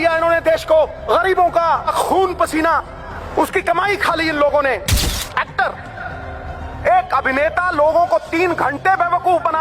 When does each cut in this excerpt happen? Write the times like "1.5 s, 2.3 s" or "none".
1.0 s, 1.9 s, 3.1 s, 5.1 s